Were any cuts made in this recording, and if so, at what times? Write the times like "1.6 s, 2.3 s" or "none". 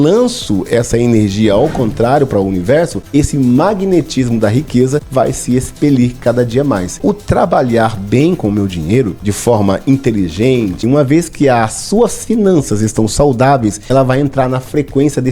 3.0 s, 5.1 s, 7.0 s, 9.2 s, 10.9 s, 13.8 s

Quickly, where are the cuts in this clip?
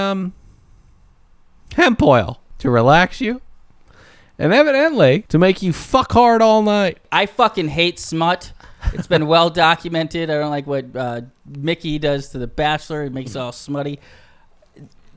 2.4 s, 5.2 s, 7.0 s

